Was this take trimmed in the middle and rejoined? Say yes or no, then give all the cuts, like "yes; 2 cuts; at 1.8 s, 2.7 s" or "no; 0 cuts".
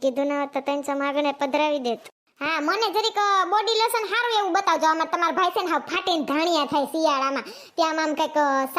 yes; 1 cut; at 2.2 s